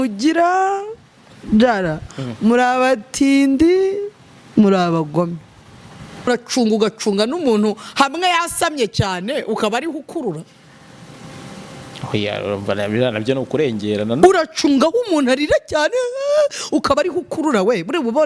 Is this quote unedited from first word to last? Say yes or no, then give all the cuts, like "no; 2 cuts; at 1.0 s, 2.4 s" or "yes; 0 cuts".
no; 1 cut; at 6.3 s